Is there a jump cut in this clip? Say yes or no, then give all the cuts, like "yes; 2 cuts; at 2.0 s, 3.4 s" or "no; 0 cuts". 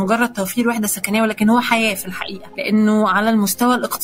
no; 0 cuts